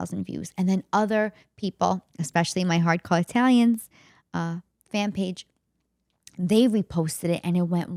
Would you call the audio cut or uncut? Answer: uncut